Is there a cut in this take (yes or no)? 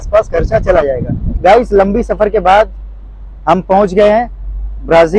yes